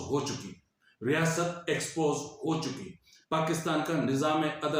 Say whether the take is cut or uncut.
uncut